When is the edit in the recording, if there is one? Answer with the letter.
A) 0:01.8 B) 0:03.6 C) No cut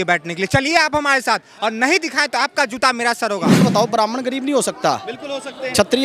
B